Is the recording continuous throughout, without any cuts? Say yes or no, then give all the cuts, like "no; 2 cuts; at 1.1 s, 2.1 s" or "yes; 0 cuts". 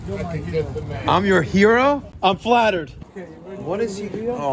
no; 2 cuts; at 2.1 s, 3.0 s